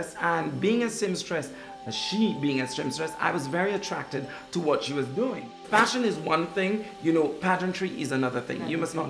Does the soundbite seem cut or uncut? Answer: cut